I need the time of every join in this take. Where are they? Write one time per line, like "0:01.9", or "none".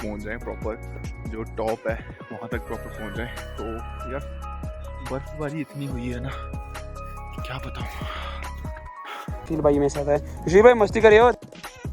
0:09.4